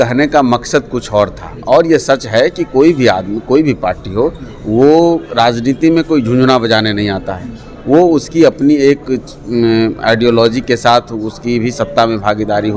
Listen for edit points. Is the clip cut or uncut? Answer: uncut